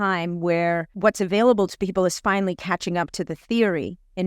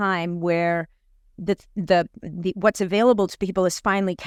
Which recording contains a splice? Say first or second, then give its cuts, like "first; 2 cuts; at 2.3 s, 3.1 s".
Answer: first; 1 cut; at 1.0 s